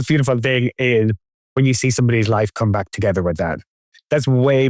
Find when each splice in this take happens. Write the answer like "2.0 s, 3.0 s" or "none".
3.6 s

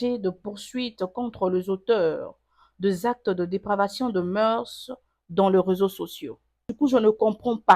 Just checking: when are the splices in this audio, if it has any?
6.7 s

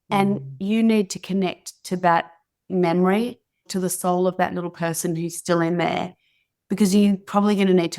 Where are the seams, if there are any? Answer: 3.7 s

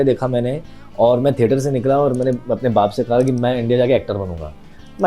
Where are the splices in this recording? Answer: none

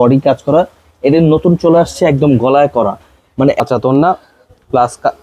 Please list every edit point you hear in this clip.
3.6 s

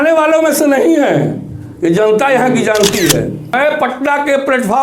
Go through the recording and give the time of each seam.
3.5 s

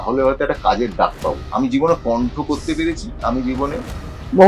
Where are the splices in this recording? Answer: 1.4 s

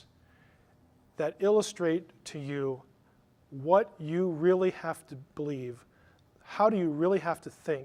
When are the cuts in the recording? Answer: none

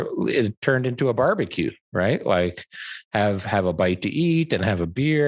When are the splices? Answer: none

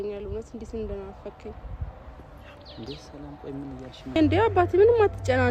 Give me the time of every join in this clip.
4.2 s

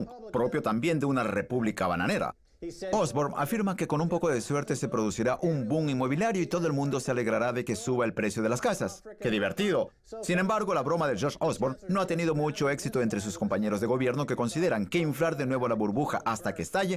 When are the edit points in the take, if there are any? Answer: 1.8 s

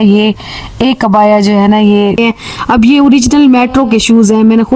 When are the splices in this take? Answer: 2.2 s

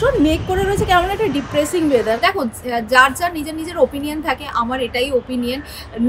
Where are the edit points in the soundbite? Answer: 2.2 s

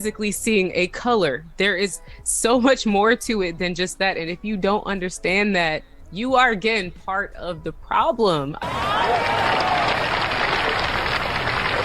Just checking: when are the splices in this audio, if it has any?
8.6 s

